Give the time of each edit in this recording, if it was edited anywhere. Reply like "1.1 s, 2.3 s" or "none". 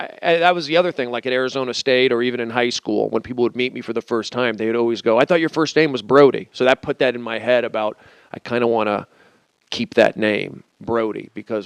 1.5 s